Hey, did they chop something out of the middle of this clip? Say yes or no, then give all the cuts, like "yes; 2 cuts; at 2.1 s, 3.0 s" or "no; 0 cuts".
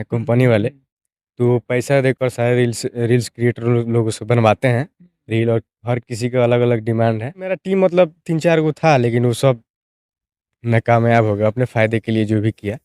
yes; 1 cut; at 7.6 s